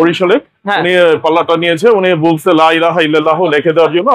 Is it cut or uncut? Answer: uncut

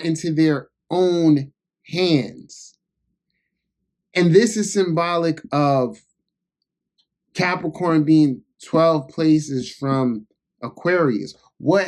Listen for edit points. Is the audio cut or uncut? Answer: uncut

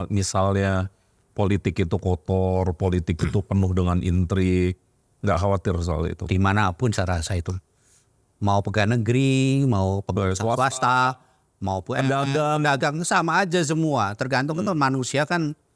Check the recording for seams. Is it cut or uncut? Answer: uncut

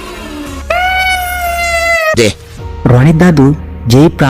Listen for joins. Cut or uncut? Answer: cut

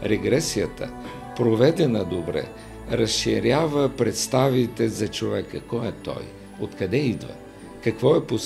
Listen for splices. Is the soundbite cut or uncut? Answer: uncut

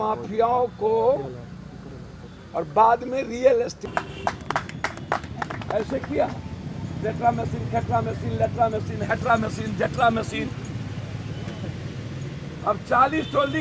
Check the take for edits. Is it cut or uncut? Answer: uncut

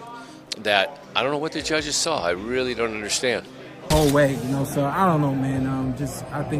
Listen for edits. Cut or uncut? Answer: cut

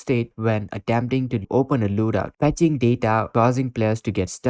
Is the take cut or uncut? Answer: cut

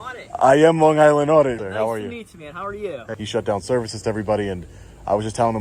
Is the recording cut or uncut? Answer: cut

